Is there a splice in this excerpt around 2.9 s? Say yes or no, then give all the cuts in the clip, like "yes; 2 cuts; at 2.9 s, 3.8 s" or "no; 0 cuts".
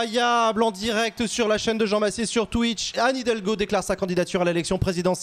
yes; 1 cut; at 2.9 s